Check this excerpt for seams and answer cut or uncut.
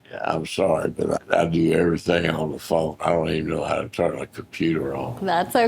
uncut